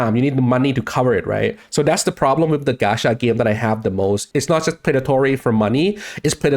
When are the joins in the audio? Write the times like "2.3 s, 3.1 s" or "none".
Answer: 4.2 s